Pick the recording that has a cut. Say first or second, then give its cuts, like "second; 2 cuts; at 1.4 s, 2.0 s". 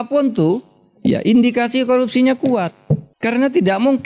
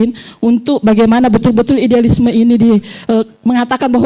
first; 1 cut; at 3.1 s